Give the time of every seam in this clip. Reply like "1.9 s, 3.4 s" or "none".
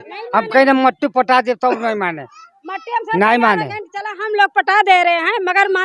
none